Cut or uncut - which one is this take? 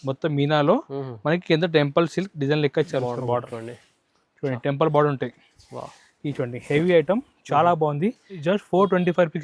cut